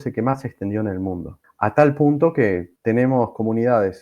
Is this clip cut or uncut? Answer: cut